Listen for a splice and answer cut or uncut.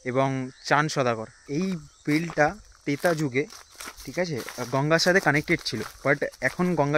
cut